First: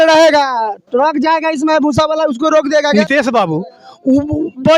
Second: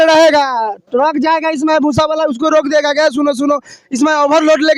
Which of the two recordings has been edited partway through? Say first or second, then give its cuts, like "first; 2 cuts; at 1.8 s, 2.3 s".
first; 1 cut; at 2.9 s